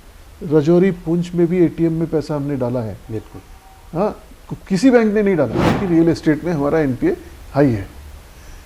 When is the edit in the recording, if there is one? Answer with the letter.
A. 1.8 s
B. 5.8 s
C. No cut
B